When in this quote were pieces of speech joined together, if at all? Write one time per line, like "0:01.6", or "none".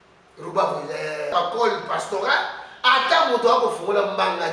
0:01.3

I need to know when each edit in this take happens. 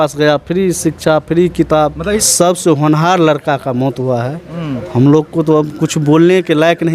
0:02.2

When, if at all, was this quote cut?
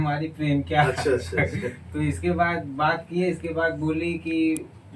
none

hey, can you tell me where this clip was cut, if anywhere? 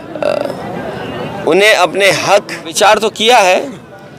0:02.7

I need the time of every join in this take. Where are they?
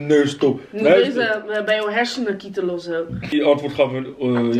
0:03.2

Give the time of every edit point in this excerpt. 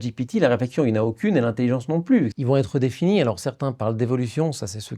0:02.4

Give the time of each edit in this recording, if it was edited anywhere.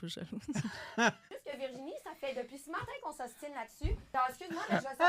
0:01.2
0:04.0

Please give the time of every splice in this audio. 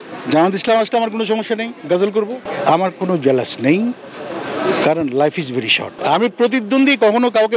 0:02.3
0:06.0

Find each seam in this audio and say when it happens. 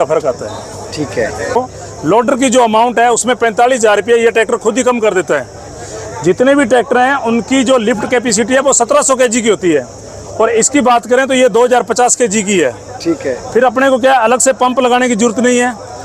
0:01.6

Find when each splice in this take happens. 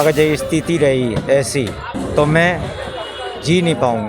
0:01.9

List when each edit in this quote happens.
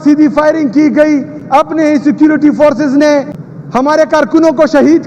0:03.8

